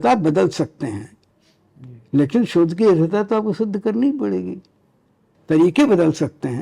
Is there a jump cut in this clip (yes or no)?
yes